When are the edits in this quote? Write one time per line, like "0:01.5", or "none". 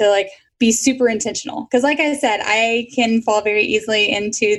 0:01.3